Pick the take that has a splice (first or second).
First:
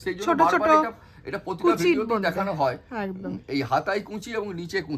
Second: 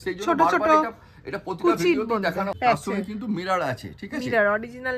second